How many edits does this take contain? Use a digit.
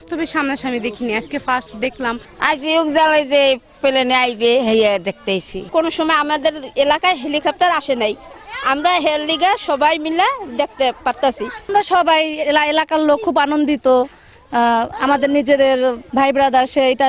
3